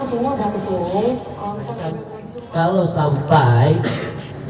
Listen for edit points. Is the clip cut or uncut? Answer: cut